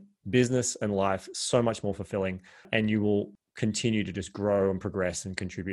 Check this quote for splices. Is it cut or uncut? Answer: cut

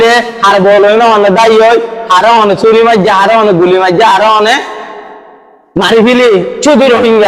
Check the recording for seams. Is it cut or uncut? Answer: uncut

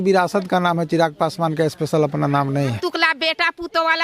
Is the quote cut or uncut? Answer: cut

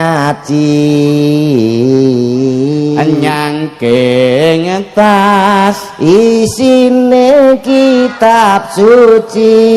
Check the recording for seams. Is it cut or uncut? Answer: uncut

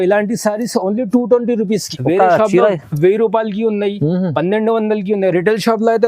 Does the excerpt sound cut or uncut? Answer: cut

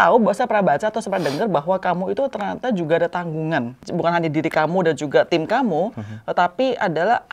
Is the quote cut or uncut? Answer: cut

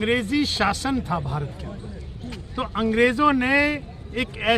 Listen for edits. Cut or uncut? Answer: uncut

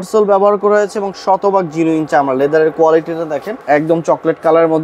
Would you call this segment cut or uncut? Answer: cut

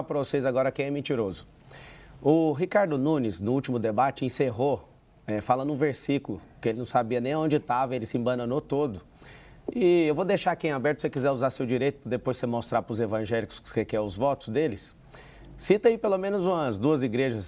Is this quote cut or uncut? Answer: uncut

